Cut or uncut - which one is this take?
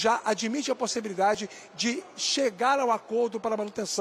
uncut